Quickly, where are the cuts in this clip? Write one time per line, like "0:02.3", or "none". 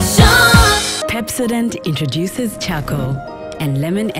0:00.9